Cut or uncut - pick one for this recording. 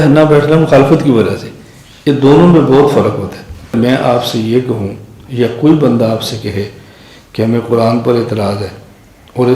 cut